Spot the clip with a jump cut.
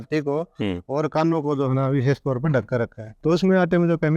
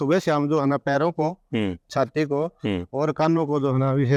first; 1 cut; at 3.0 s

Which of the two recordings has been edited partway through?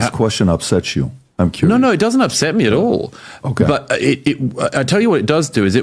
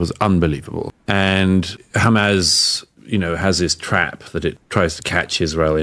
second; 3 cuts; at 0.9 s, 1.8 s, 4.6 s

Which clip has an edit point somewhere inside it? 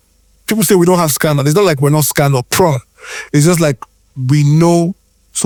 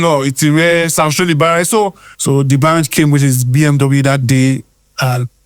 second; 1 cut; at 2.1 s

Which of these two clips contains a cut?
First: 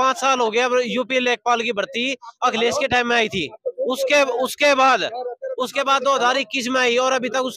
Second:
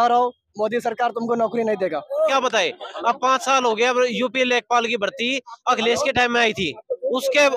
second; 1 cut; at 2.3 s

